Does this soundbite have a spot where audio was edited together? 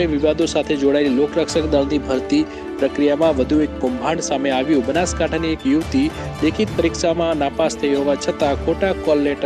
no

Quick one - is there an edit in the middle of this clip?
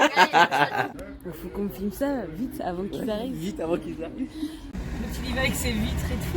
yes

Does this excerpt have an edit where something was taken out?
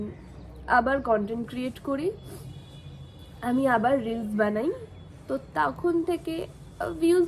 no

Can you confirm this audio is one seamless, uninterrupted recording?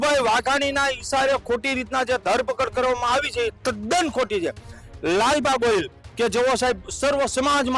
yes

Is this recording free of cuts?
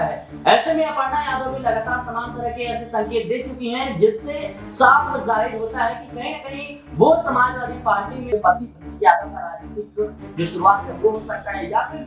no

